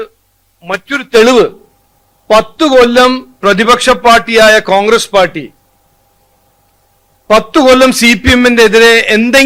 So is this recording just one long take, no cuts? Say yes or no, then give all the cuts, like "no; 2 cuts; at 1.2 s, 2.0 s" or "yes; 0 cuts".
yes; 0 cuts